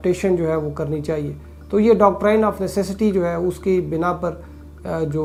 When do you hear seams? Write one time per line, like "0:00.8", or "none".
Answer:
none